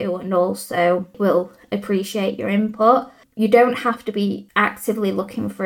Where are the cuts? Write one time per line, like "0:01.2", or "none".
0:01.2
0:03.2
0:04.4